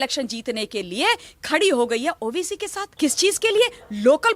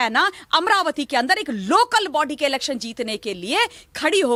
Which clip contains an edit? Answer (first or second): first